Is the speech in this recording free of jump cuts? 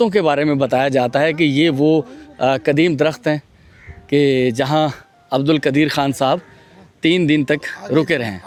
yes; 0 cuts

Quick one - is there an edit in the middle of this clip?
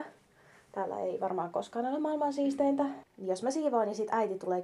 yes; 1 cut; at 3.1 s

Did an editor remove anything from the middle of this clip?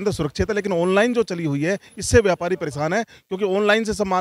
no; 0 cuts

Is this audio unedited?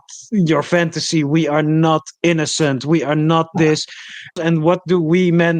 no; 1 cut; at 4.4 s

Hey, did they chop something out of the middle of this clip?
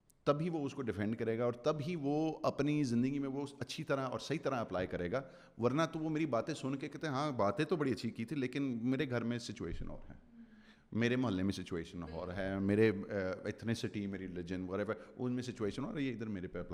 no; 0 cuts

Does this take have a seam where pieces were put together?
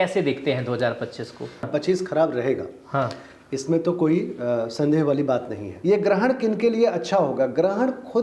yes; 2 cuts; at 1.6 s, 5.7 s

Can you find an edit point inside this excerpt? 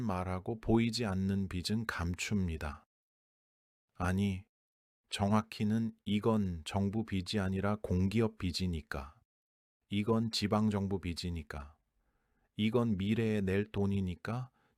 no; 0 cuts

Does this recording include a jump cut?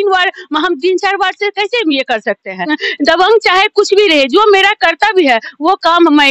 yes; 1 cut; at 2.7 s

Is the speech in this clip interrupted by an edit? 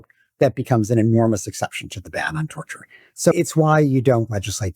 yes; 1 cut; at 3.3 s

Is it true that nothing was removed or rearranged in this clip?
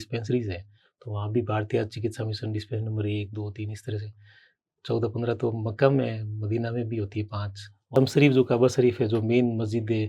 no; 1 cut; at 8.0 s

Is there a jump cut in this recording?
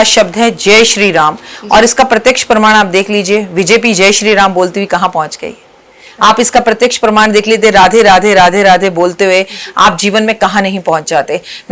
no; 0 cuts

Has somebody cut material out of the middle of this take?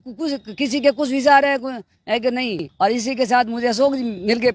yes; 1 cut; at 2.6 s

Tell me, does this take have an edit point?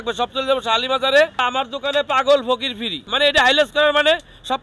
yes; 2 cuts; at 1.4 s, 3.0 s

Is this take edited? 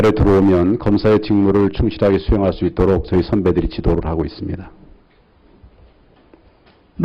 no; 0 cuts

